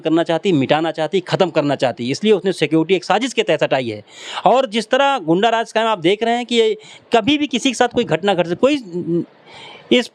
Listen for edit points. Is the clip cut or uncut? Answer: uncut